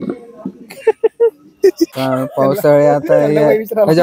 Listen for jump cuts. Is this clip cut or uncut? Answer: cut